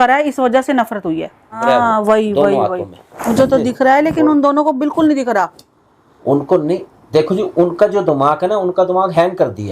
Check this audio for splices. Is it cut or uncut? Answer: cut